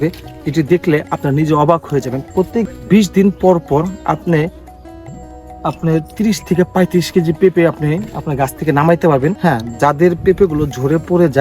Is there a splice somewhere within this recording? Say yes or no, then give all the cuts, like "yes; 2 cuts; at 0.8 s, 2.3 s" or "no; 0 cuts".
yes; 2 cuts; at 2.7 s, 9.4 s